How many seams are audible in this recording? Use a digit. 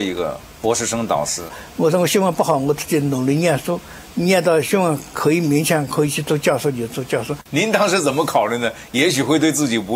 2